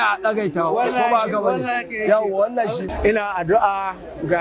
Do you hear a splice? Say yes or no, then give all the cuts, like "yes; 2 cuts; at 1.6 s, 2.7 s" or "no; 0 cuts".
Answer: yes; 1 cut; at 2.9 s